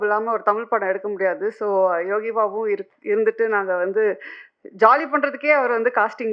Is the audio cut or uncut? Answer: uncut